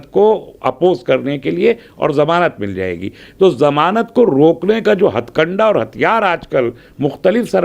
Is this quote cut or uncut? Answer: uncut